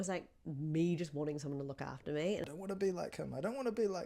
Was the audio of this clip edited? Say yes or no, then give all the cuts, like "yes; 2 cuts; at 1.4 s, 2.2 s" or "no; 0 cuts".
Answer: yes; 1 cut; at 2.4 s